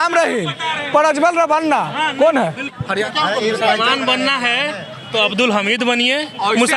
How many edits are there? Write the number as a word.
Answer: one